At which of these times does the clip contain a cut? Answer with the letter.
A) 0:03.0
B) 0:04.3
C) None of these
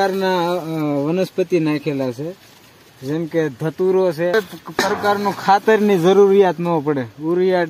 B